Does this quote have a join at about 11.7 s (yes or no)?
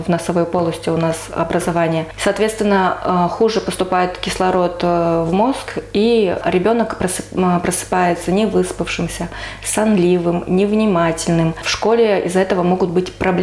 yes